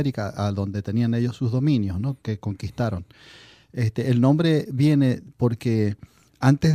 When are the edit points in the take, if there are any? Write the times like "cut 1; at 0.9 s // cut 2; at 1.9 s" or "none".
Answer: cut 1; at 4.7 s